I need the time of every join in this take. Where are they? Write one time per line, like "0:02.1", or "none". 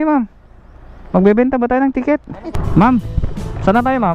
0:02.6